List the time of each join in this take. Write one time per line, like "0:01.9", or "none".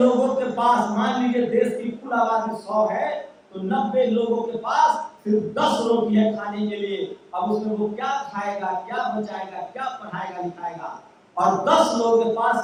none